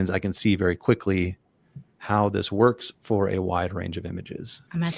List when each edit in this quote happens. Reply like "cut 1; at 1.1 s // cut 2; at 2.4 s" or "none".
none